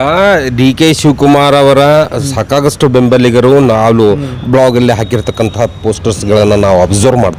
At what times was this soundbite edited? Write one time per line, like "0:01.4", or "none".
none